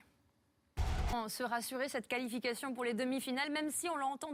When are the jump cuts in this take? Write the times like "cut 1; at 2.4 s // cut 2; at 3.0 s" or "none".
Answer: none

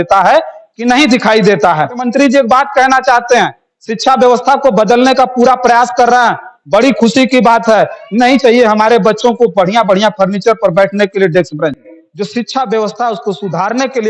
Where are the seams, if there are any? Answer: cut 1; at 2.1 s // cut 2; at 11.9 s

